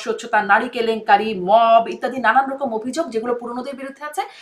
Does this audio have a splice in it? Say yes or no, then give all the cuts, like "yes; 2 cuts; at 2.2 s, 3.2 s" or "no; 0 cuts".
no; 0 cuts